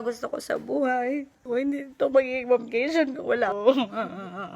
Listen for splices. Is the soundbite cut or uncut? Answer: cut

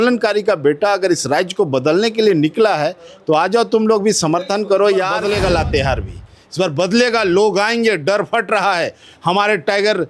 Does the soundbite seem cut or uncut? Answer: cut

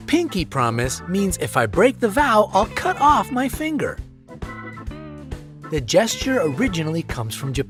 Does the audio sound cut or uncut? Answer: uncut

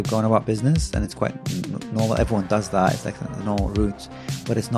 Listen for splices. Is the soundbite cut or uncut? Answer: uncut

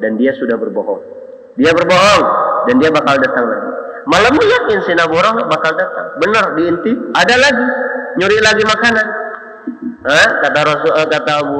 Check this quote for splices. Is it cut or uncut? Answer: uncut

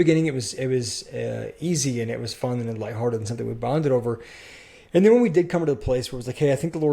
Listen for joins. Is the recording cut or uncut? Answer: uncut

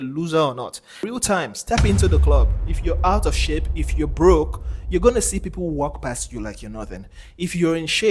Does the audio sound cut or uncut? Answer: cut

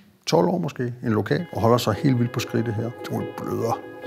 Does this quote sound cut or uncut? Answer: cut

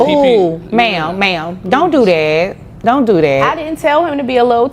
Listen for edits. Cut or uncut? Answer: uncut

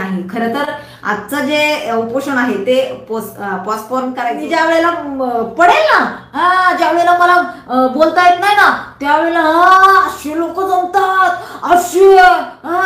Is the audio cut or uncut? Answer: cut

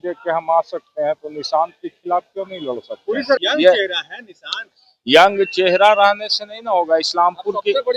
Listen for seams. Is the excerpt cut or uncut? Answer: cut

